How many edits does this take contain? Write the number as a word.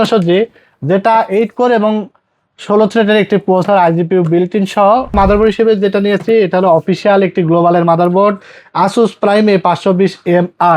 one